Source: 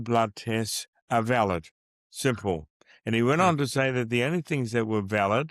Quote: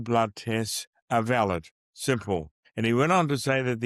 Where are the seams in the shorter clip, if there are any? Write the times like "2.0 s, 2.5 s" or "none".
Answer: 2.2 s